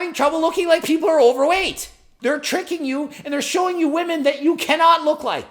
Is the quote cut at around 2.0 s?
yes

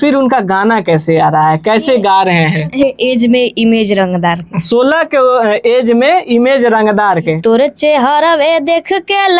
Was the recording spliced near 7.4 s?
yes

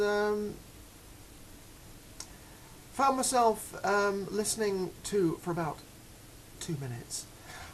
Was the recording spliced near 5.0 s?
no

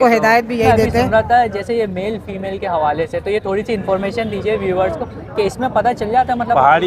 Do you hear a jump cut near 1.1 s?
yes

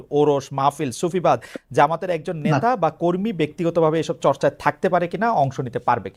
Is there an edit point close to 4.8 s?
no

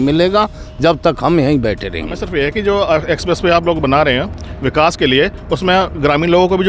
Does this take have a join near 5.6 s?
no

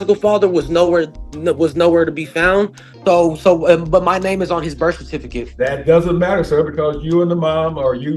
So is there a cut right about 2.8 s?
yes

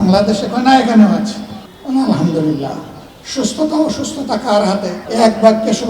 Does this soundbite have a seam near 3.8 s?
no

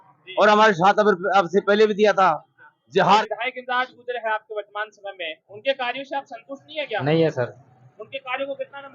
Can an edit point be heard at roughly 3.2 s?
yes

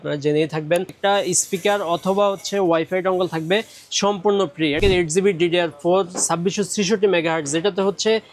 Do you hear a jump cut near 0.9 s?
yes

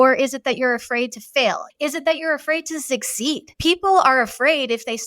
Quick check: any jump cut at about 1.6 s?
yes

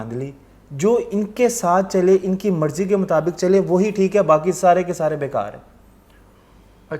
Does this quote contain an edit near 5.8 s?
no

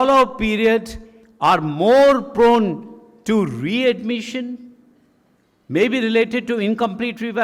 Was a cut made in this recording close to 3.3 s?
no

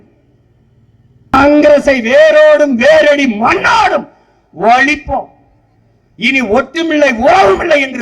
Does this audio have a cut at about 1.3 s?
yes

